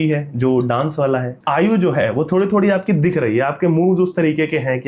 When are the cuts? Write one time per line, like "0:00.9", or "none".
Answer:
none